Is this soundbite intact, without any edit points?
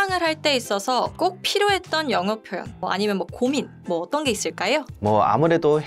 no; 3 cuts; at 1.1 s, 2.8 s, 4.9 s

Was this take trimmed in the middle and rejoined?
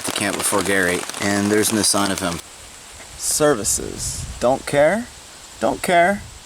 yes; 2 cuts; at 1.0 s, 2.4 s

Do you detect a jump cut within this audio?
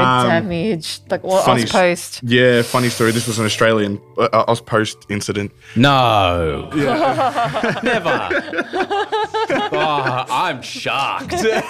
no; 0 cuts

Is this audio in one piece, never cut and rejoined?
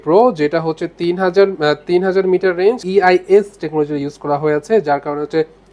no; 1 cut; at 2.8 s

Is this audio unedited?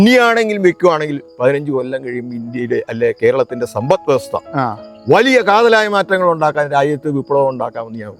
yes; 0 cuts

